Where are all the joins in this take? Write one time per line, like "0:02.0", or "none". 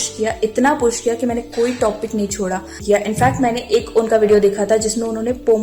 0:02.8